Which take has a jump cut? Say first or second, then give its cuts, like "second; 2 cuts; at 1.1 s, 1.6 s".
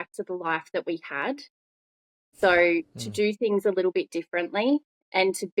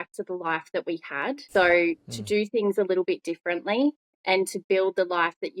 second; 1 cut; at 1.4 s